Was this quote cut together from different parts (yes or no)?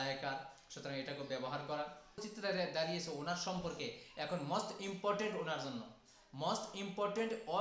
yes